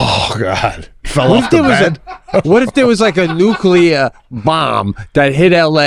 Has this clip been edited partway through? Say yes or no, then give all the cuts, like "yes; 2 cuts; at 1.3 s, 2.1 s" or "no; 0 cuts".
no; 0 cuts